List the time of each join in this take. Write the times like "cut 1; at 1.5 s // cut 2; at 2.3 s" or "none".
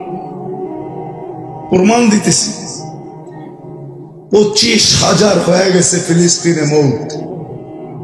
none